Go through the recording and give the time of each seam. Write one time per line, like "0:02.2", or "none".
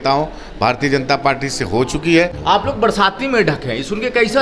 0:02.4